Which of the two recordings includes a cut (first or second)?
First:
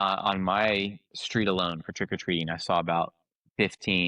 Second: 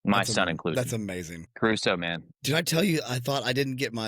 second